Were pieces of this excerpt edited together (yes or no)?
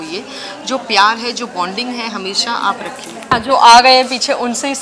yes